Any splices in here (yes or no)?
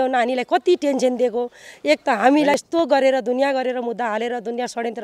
yes